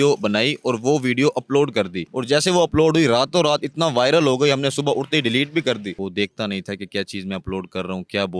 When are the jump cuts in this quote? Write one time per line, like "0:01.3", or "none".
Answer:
0:02.1
0:05.9